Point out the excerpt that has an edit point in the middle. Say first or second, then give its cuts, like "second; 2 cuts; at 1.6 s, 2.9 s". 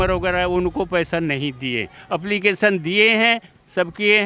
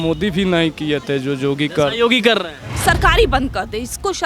second; 1 cut; at 2.8 s